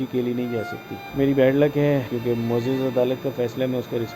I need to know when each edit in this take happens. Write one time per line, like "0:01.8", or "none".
0:01.0
0:02.1